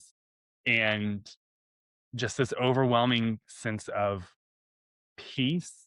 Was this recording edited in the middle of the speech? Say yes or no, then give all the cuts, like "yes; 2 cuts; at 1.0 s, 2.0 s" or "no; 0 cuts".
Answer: no; 0 cuts